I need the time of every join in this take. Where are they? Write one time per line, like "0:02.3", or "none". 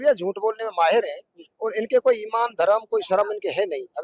none